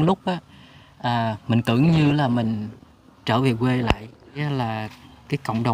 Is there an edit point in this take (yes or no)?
yes